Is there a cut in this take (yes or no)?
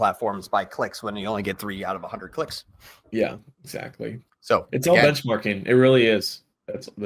no